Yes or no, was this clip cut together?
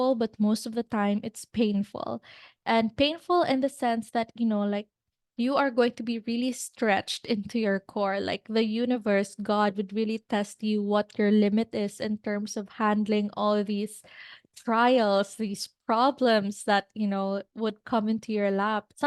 no